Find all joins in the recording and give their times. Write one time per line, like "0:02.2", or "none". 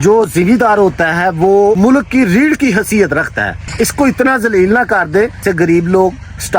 0:01.8
0:03.6
0:05.4